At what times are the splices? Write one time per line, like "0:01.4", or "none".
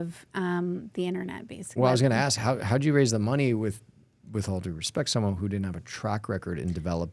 0:01.7